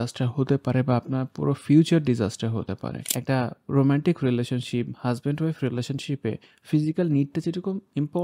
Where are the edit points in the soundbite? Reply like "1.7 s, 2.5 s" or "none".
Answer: 3.0 s